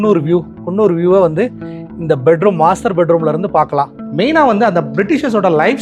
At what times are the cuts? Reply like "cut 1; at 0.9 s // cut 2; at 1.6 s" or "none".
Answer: cut 1; at 4.0 s